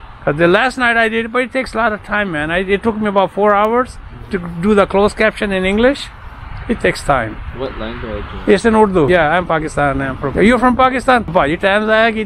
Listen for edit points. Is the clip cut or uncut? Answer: cut